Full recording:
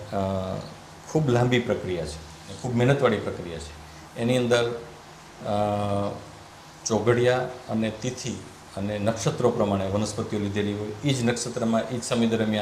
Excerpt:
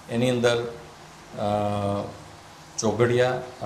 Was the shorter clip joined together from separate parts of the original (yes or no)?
no